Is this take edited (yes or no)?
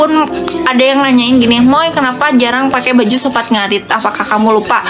no